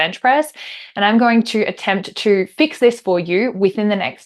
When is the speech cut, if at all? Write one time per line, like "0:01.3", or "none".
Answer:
none